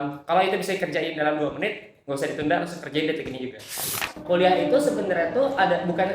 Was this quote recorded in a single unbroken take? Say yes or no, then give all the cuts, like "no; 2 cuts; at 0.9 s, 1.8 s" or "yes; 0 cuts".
no; 1 cut; at 4.1 s